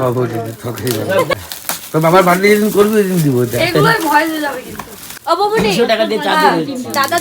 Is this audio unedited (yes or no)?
no